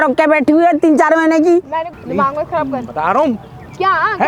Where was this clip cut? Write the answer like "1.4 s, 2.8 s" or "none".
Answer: 2.0 s

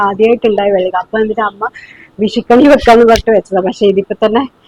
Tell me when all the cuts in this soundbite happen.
none

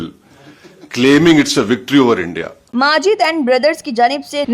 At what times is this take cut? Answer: 2.7 s

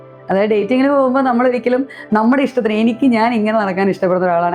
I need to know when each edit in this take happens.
none

